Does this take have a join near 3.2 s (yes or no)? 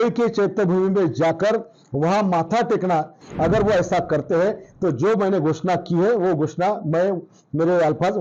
yes